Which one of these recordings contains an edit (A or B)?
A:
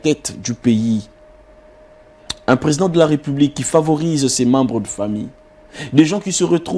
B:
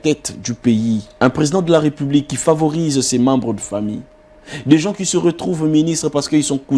B